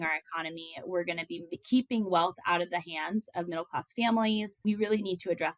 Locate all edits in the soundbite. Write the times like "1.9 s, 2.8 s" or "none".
4.6 s